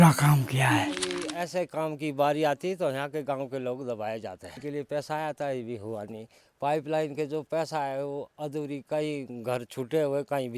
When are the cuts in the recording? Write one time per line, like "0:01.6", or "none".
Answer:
0:01.3
0:04.6